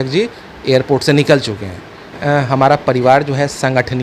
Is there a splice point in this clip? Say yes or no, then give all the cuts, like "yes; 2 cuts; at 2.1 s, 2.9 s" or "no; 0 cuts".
yes; 1 cut; at 2.2 s